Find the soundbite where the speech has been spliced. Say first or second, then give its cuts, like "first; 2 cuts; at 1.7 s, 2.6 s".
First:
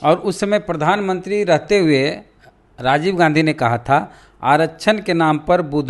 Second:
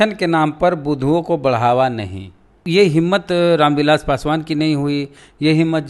second; 1 cut; at 2.5 s